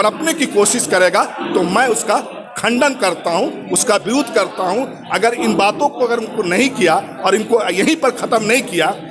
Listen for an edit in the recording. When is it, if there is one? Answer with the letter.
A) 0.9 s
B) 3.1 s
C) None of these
C